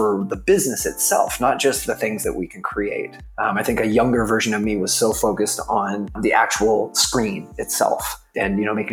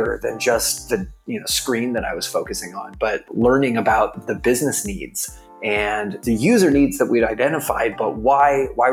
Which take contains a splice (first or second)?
second